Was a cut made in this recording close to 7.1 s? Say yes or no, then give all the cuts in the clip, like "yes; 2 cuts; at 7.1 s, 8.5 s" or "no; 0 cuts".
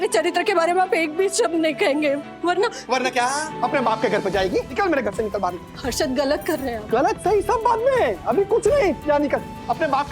no; 2 cuts; at 3.5 s, 4.7 s